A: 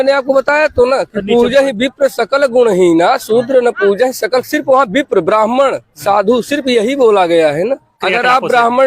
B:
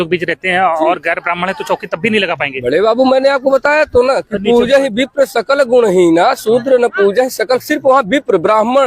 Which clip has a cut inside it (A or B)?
A